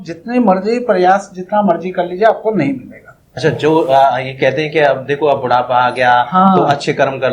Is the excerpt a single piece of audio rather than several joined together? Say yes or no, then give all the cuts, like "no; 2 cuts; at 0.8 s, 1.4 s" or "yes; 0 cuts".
no; 1 cut; at 3.3 s